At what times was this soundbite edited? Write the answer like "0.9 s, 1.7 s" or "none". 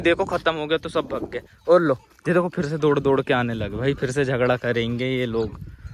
none